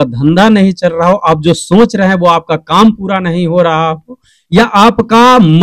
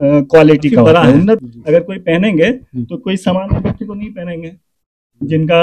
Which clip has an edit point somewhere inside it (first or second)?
second